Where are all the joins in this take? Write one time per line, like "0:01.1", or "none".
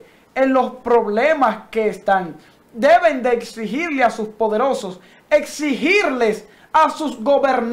none

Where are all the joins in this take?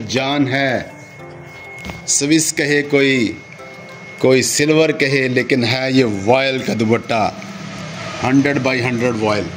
none

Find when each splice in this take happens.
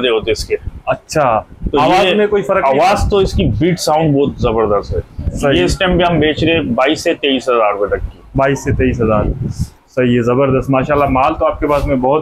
none

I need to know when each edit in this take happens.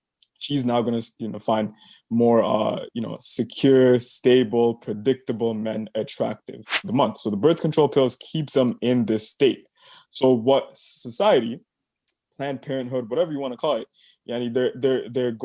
0:06.8

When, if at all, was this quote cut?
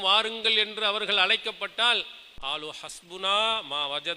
0:02.7

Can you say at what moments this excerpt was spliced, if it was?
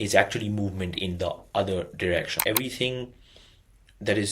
0:02.3

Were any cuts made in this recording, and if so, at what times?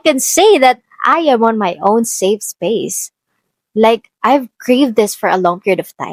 none

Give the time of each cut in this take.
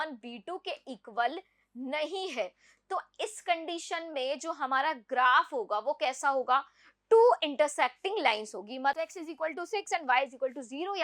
0:09.0

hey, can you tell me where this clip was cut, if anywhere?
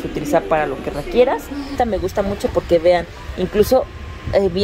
0:01.7

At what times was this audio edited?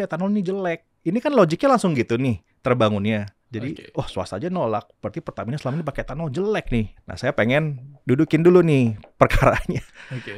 0:00.9
0:03.4
0:07.0

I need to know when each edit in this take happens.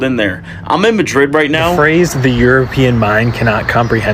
0:01.8

